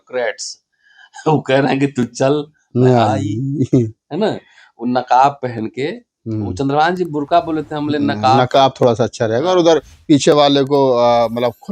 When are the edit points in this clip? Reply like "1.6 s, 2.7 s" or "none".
none